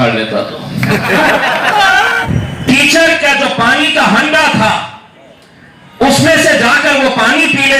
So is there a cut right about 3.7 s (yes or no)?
no